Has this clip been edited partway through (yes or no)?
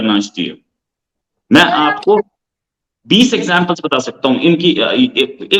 no